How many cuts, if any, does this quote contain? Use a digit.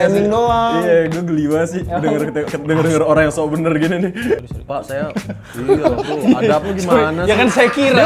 1